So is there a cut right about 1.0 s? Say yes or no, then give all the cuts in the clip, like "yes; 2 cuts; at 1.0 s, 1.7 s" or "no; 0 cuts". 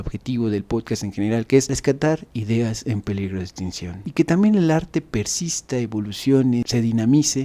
no; 1 cut; at 4.0 s